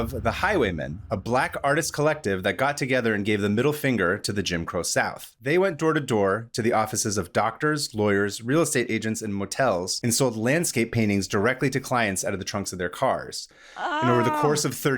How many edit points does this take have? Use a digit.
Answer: 2